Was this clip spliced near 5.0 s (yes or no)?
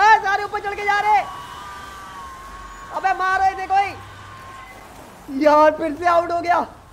no